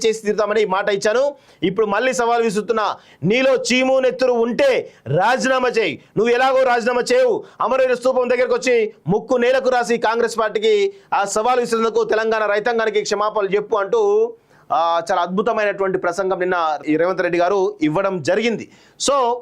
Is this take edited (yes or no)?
yes